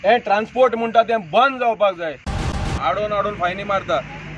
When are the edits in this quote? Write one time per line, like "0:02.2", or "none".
0:02.6